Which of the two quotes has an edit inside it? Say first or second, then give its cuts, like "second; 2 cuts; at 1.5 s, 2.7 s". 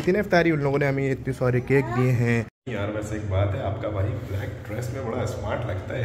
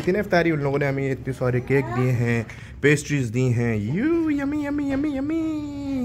first; 1 cut; at 2.6 s